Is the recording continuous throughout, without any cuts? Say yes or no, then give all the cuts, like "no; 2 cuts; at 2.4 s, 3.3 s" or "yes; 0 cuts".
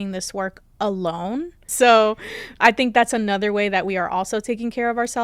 no; 1 cut; at 1.7 s